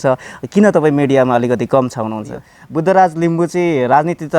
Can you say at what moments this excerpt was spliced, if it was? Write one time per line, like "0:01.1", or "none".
0:02.6